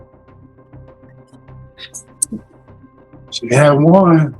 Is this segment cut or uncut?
uncut